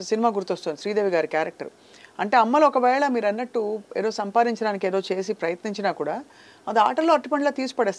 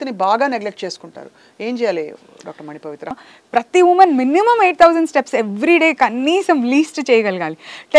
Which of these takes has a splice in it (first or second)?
second